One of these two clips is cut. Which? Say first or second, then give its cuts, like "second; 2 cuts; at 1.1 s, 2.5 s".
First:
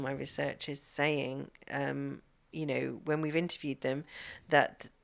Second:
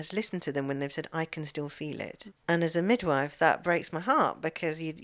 second; 1 cut; at 2.2 s